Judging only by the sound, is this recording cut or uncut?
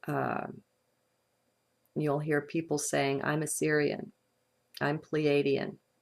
cut